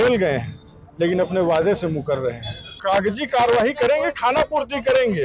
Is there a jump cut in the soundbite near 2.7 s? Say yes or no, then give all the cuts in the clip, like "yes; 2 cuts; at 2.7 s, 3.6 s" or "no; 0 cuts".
yes; 1 cut; at 2.7 s